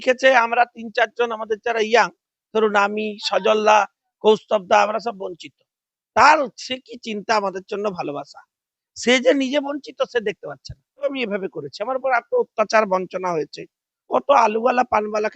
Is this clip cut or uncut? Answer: cut